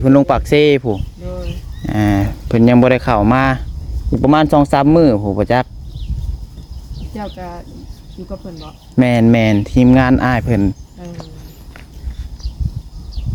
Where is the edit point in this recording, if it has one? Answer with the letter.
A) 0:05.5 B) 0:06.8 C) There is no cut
C